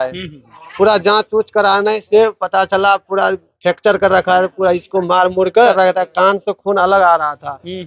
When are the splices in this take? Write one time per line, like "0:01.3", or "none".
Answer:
0:05.7